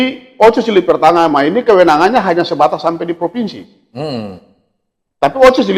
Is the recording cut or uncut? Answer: uncut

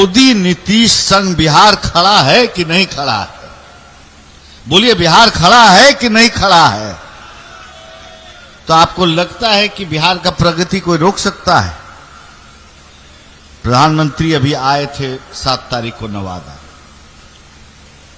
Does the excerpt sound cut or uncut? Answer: uncut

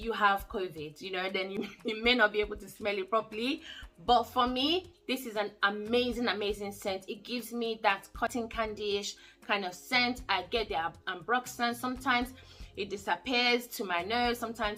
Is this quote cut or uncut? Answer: uncut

